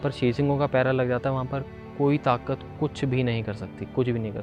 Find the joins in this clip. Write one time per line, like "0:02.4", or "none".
none